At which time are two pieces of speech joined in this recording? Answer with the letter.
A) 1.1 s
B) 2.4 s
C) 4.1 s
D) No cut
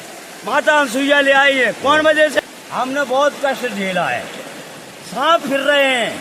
B